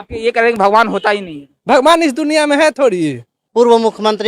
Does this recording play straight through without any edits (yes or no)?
no